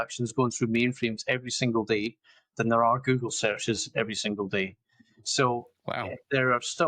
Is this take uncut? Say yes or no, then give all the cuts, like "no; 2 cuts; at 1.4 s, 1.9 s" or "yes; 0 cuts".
yes; 0 cuts